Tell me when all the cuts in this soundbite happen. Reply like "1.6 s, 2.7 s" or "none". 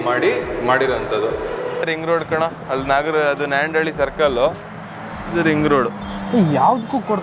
1.9 s